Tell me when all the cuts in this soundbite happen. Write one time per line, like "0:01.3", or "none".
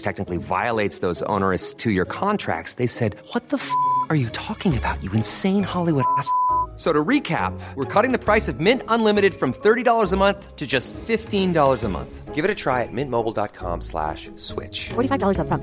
none